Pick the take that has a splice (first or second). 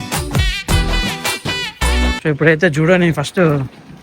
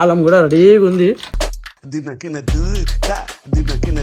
first